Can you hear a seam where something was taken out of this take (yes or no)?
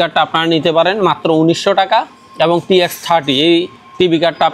no